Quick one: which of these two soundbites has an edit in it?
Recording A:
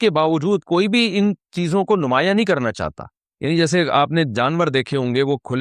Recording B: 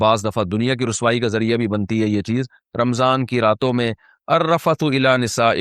B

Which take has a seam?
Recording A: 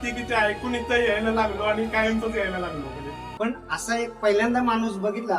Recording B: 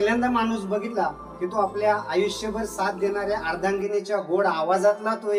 A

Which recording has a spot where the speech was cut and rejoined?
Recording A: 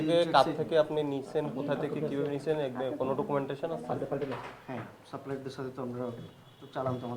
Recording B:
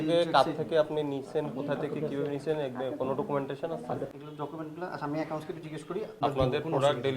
B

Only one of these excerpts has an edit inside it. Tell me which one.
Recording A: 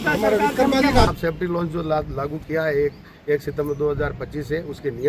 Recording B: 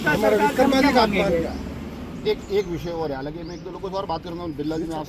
A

